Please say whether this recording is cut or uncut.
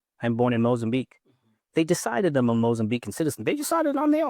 uncut